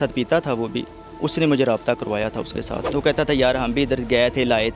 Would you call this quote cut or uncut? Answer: cut